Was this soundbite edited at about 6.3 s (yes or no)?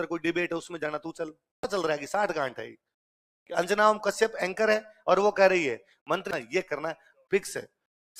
yes